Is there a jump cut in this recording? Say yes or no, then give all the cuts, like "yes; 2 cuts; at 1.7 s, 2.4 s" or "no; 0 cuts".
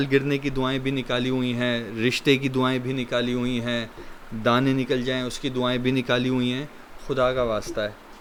no; 0 cuts